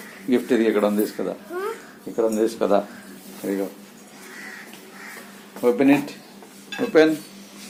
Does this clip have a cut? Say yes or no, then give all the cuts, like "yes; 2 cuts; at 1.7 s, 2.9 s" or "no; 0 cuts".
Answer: no; 0 cuts